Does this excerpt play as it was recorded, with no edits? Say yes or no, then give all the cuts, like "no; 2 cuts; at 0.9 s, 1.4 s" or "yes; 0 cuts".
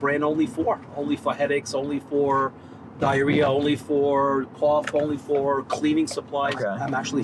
yes; 0 cuts